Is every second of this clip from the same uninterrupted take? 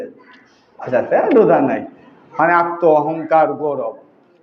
yes; 0 cuts

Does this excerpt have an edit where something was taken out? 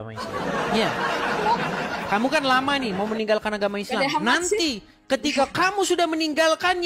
no; 0 cuts

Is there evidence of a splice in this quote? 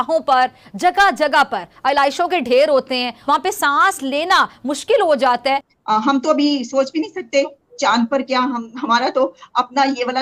yes; 2 cuts; at 3.1 s, 5.7 s

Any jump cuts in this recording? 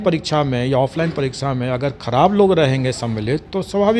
no; 0 cuts

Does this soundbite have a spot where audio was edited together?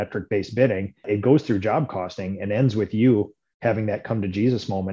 yes; 1 cut; at 1.0 s

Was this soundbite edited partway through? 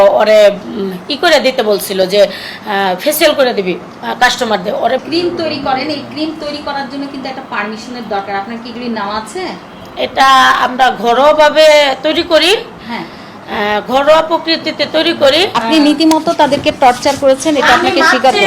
yes; 2 cuts; at 5.0 s, 15.5 s

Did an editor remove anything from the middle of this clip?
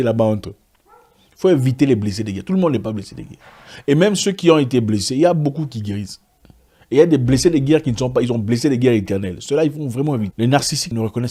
yes; 1 cut; at 10.3 s

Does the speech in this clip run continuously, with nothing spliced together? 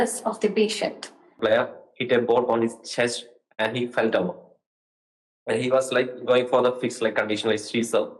no; 1 cut; at 1.4 s

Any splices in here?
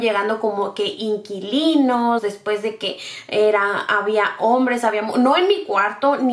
no; 0 cuts

